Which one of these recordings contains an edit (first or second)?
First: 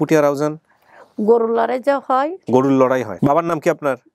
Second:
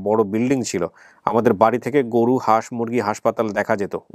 first